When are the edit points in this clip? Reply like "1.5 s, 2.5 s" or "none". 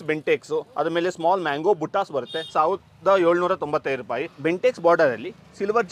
4.3 s